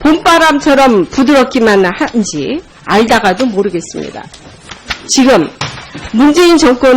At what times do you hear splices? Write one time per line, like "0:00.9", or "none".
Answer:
0:02.4